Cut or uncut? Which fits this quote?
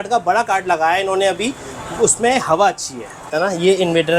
cut